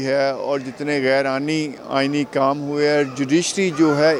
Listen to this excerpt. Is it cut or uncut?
uncut